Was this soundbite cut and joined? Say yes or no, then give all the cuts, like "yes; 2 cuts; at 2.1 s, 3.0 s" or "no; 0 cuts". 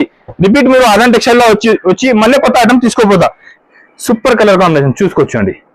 yes; 1 cut; at 3.5 s